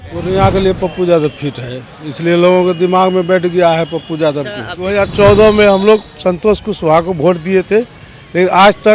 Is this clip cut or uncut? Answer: cut